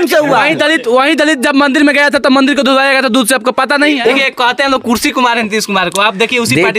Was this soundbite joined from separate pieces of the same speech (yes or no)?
yes